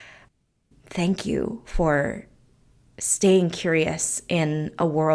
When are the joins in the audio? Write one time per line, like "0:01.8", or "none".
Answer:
none